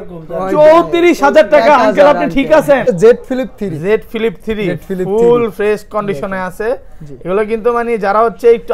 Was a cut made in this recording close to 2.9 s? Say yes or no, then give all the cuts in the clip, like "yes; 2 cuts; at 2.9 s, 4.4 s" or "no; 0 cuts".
yes; 1 cut; at 2.9 s